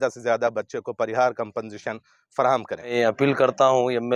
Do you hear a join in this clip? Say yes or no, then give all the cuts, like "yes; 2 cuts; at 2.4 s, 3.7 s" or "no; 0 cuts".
yes; 1 cut; at 2.9 s